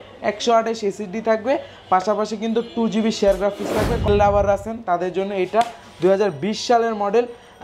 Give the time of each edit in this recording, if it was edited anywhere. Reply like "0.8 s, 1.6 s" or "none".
4.1 s